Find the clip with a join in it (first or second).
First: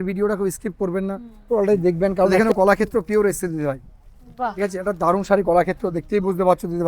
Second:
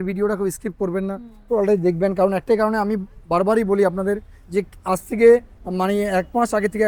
first